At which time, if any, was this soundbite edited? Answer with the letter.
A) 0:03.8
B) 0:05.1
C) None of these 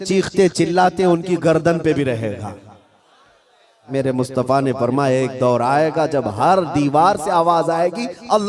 A